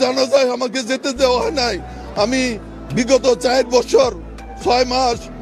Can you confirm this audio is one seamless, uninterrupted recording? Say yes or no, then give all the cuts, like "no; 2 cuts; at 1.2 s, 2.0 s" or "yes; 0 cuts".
no; 1 cut; at 2.8 s